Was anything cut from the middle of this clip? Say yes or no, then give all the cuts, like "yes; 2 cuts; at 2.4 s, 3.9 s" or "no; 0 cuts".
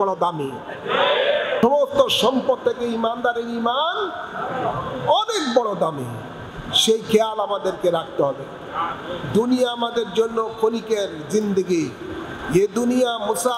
yes; 1 cut; at 1.6 s